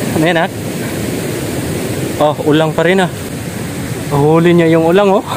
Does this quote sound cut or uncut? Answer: cut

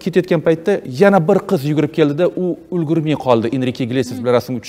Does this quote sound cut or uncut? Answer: uncut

